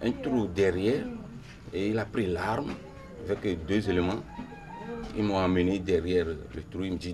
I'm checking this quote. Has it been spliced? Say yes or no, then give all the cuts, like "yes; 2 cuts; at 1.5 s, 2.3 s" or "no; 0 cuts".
no; 0 cuts